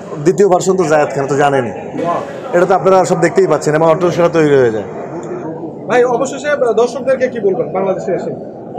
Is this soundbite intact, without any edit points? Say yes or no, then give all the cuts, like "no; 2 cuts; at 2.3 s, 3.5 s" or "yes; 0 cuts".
yes; 0 cuts